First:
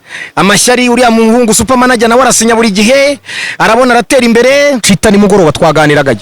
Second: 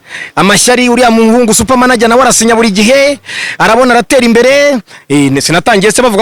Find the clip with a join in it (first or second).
first